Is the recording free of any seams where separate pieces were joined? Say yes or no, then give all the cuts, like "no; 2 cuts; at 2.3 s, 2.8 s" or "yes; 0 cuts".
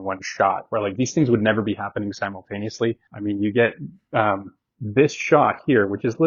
no; 1 cut; at 3.1 s